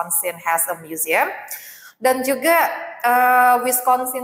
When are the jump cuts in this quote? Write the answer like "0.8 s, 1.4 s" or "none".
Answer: none

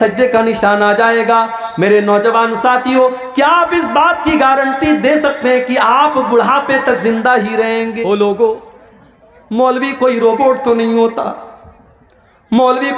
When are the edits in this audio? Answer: 8.0 s

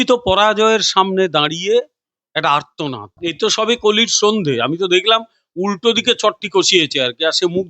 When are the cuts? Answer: 3.1 s

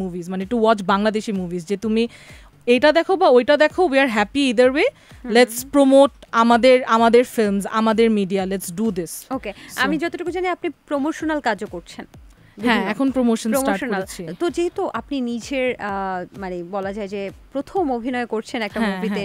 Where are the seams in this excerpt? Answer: none

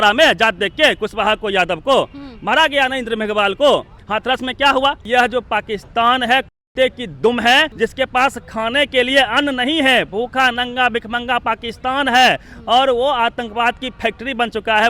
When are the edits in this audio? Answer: 4.0 s, 5.0 s, 7.7 s

